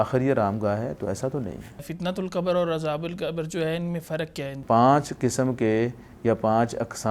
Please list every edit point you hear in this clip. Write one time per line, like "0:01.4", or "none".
0:01.9
0:04.6